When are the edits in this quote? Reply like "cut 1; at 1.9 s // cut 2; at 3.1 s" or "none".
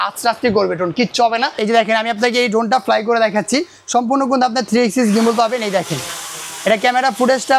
cut 1; at 1.6 s